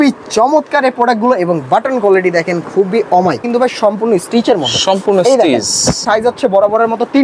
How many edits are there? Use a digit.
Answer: 2